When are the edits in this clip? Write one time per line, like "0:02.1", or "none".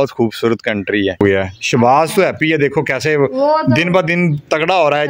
0:01.2